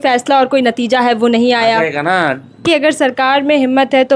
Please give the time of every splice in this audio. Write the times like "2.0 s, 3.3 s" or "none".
2.6 s